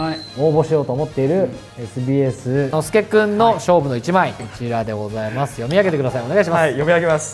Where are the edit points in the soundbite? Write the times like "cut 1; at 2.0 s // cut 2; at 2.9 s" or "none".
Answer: cut 1; at 2.8 s // cut 2; at 4.5 s